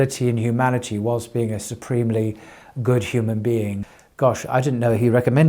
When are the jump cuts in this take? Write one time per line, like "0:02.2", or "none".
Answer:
0:03.9